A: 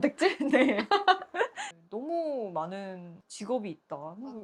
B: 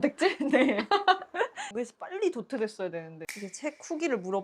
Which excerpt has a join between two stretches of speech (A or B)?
B